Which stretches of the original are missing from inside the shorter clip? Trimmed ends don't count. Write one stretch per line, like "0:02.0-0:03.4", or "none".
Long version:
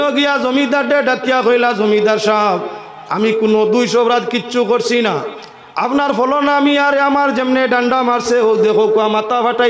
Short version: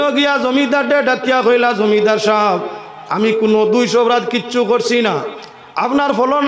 none